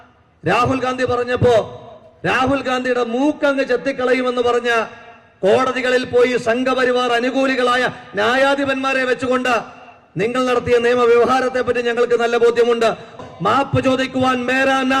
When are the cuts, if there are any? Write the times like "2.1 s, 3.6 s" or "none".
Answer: 13.2 s